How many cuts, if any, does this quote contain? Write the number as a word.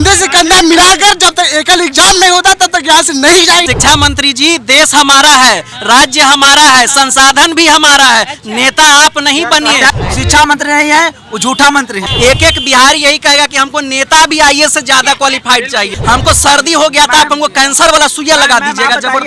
four